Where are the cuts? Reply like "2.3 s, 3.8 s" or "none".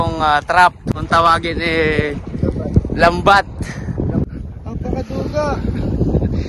1.0 s, 4.3 s